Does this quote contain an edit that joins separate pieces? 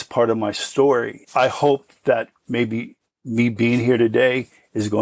yes; 1 cut; at 1.2 s

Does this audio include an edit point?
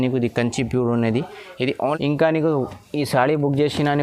yes; 1 cut; at 1.8 s

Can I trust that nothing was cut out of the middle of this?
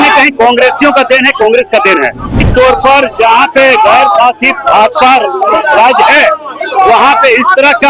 no; 1 cut; at 2.4 s

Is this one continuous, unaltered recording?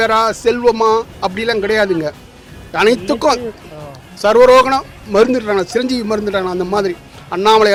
yes; 0 cuts

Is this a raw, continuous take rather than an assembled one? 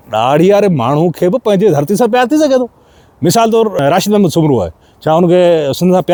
yes; 0 cuts

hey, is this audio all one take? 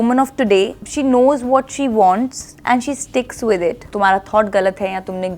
no; 1 cut; at 3.9 s

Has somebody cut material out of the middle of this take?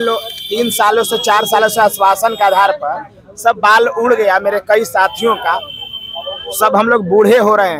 no; 0 cuts

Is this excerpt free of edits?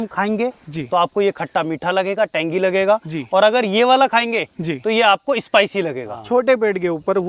no; 1 cut; at 6.1 s

